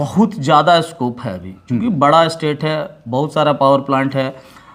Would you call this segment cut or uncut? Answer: uncut